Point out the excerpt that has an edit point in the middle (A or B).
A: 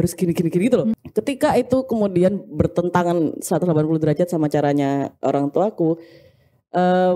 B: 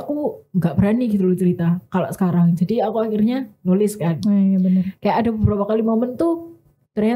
A